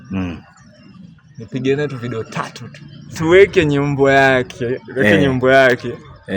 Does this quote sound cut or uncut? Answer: cut